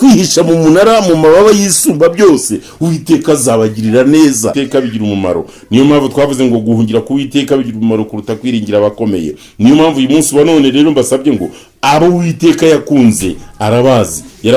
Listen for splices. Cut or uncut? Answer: cut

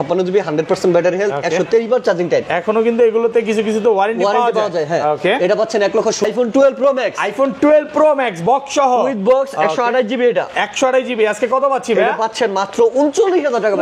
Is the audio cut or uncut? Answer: cut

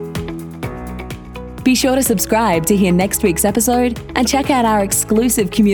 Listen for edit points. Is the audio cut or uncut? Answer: cut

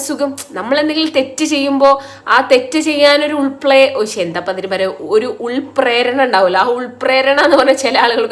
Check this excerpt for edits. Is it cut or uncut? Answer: uncut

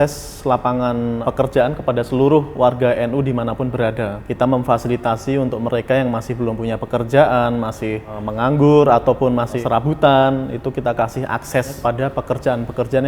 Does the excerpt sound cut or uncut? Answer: cut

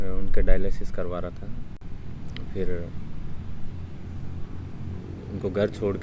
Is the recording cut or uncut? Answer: uncut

